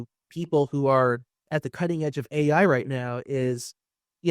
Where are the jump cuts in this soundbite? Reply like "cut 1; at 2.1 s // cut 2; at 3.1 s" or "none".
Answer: none